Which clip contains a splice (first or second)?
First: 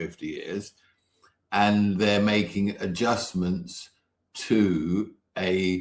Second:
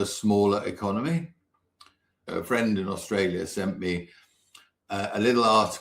second